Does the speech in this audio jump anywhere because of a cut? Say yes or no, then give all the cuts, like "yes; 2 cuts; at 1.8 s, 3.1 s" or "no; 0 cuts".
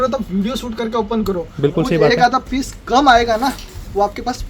no; 0 cuts